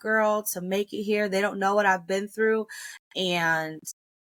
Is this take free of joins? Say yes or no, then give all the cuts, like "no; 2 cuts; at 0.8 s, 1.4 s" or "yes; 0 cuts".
yes; 0 cuts